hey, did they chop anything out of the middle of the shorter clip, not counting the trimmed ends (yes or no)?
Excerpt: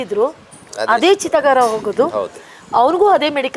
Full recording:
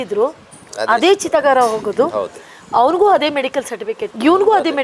no